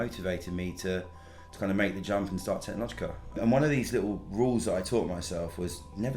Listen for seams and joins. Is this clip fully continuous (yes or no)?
no